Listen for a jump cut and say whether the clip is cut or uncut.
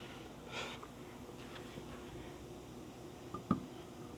uncut